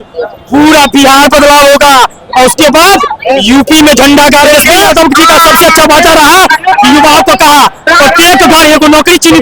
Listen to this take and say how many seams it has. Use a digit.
1